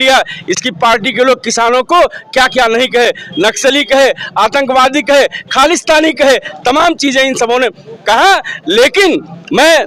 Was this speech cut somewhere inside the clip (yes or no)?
no